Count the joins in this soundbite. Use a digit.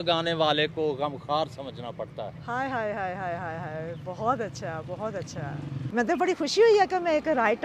1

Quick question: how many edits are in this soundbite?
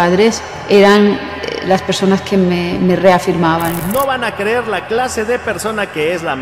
0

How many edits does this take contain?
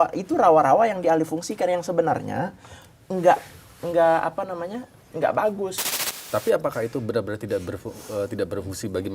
1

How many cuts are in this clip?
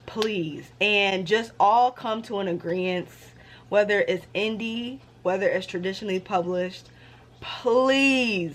0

